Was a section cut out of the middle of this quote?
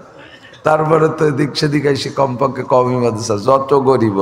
no; 0 cuts

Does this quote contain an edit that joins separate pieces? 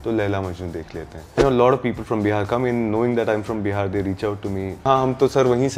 yes; 2 cuts; at 1.4 s, 4.8 s

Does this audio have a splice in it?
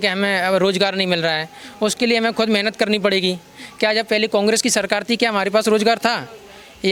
no; 0 cuts

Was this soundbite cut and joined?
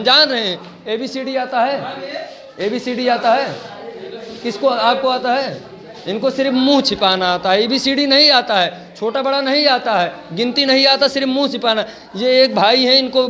no; 0 cuts

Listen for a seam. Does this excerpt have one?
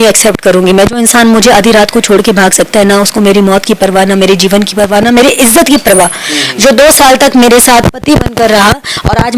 no; 0 cuts

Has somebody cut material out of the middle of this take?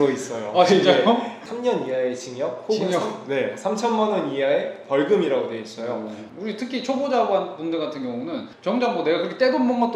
yes; 2 cuts; at 1.4 s, 6.2 s

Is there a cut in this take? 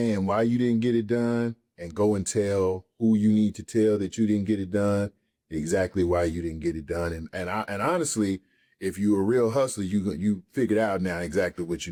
no; 0 cuts

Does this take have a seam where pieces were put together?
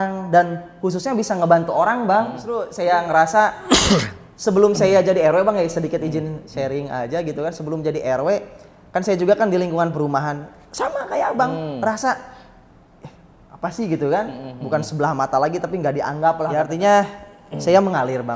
yes; 2 cuts; at 2.7 s, 16.5 s

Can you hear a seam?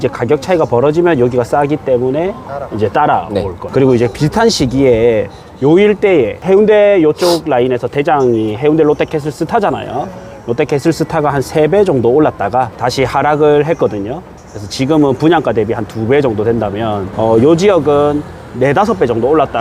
yes; 4 cuts; at 3.6 s, 6.4 s, 12.8 s, 17.1 s

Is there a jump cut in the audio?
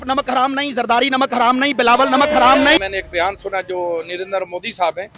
yes; 1 cut; at 2.8 s

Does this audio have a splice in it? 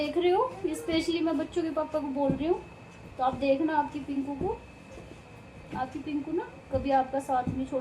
no; 0 cuts

